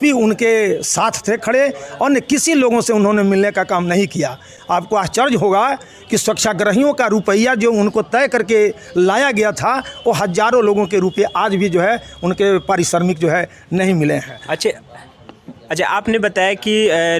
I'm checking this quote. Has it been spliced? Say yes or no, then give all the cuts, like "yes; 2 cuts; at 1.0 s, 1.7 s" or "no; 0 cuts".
no; 0 cuts